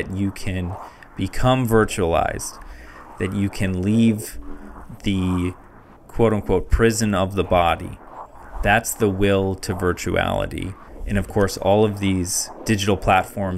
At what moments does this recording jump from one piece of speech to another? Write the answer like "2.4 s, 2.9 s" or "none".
12.5 s